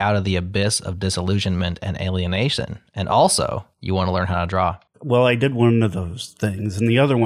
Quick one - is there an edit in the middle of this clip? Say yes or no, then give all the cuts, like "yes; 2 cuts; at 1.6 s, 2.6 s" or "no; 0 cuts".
yes; 2 cuts; at 3.7 s, 4.9 s